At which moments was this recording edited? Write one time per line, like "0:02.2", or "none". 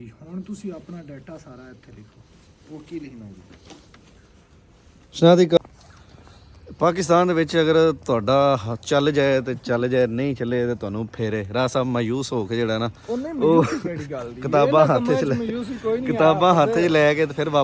0:05.6